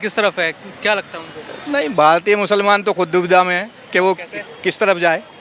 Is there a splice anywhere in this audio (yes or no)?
no